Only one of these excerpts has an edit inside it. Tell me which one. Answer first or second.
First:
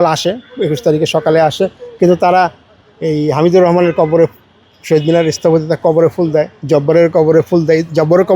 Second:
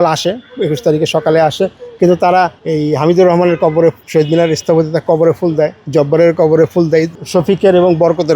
second